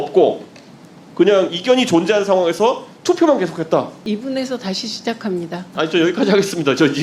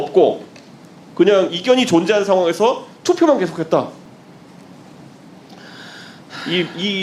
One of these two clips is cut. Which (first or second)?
first